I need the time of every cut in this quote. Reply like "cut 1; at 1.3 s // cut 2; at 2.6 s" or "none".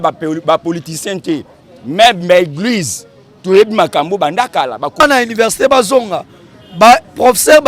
cut 1; at 5.0 s